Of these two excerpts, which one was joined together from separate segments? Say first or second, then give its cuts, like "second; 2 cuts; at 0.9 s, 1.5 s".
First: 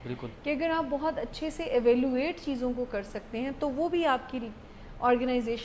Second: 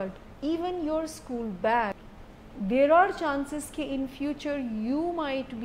second; 1 cut; at 2.1 s